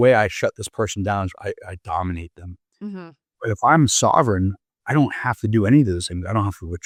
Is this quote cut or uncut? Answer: uncut